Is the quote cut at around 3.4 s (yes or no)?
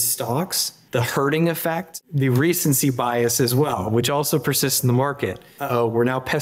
no